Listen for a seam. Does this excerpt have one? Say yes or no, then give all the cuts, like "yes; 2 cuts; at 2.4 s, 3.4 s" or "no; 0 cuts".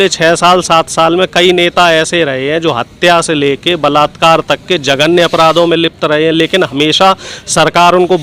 no; 0 cuts